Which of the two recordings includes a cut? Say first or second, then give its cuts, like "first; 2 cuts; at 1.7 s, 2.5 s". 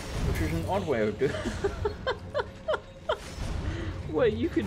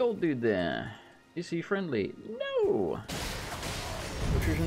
second; 1 cut; at 3.1 s